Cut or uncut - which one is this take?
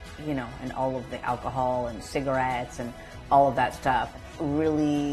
cut